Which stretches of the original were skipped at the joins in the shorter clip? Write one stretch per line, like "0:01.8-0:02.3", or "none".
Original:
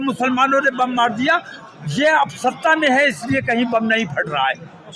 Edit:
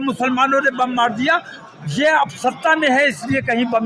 none